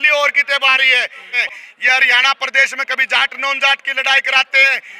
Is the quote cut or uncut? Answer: cut